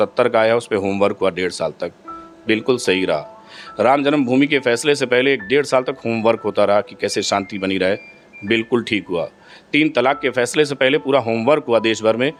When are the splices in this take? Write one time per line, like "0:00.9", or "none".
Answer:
none